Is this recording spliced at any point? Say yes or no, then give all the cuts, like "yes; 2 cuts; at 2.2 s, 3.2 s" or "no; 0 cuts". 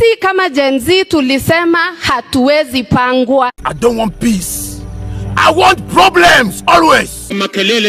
no; 0 cuts